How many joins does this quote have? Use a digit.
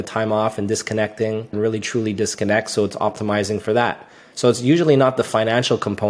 1